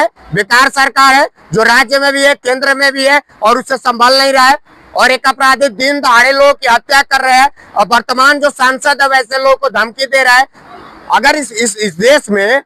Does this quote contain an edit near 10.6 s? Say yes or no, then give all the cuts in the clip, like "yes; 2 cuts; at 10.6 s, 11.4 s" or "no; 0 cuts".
yes; 1 cut; at 10.6 s